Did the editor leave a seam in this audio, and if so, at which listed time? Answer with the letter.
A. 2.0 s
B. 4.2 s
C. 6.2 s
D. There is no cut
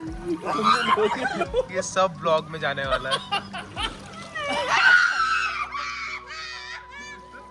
D